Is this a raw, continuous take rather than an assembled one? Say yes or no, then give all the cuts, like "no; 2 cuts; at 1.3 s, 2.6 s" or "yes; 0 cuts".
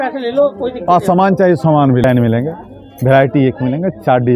no; 1 cut; at 2.0 s